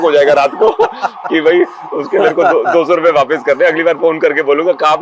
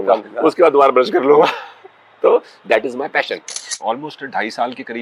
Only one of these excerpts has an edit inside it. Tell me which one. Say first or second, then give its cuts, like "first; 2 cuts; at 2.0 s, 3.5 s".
second; 1 cut; at 3.7 s